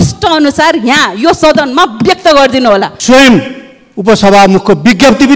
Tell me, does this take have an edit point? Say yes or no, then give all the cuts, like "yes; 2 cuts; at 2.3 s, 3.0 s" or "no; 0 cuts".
yes; 1 cut; at 2.9 s